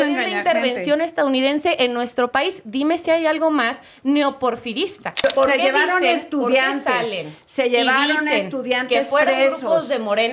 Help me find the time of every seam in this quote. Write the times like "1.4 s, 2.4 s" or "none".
5.1 s